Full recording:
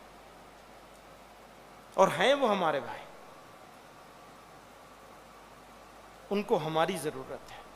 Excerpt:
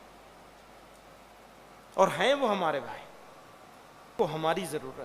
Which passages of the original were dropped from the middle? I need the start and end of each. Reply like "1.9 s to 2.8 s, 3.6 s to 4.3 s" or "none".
4.1 s to 6.5 s